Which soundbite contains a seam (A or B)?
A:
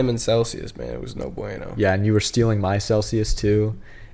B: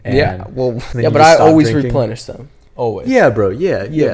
B